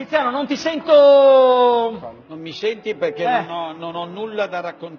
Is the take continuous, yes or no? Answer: no